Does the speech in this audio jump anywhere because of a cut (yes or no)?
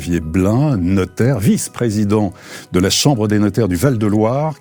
no